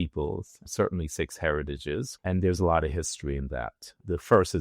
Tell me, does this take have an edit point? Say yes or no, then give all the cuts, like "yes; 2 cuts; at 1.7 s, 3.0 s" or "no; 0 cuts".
yes; 1 cut; at 2.1 s